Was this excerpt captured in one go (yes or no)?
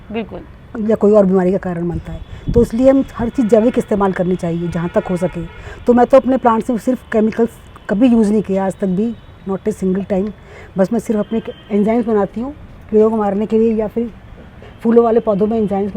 yes